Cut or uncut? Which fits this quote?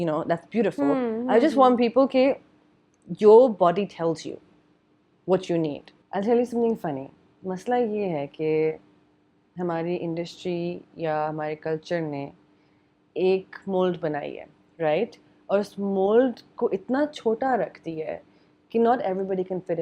cut